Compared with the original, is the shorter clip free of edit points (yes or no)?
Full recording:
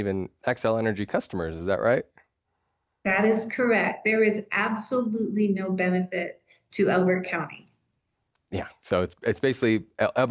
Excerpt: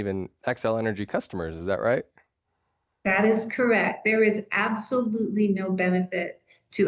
yes